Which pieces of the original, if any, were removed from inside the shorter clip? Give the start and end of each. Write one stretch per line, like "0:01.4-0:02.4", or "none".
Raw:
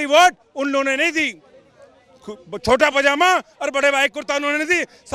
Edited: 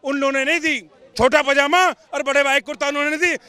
0:01.5-0:02.4